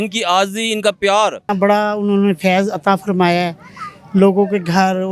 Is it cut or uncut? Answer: cut